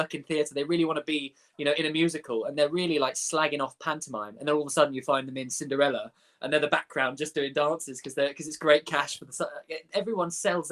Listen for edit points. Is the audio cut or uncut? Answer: uncut